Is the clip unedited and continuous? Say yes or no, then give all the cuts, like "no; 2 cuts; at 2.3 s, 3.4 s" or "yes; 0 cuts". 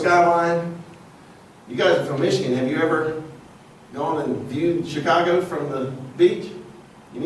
no; 1 cut; at 1.9 s